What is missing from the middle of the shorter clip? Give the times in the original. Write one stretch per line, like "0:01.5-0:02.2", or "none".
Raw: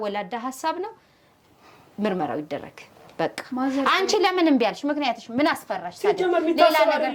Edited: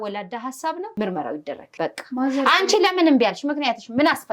0:00.9-0:02.0
0:02.6-0:03.0